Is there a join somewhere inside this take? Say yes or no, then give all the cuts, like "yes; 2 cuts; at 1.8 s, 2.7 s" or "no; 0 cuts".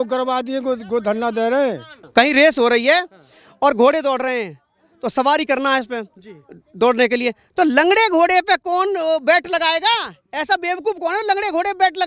yes; 1 cut; at 1.9 s